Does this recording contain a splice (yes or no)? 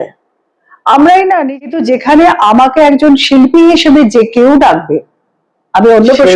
yes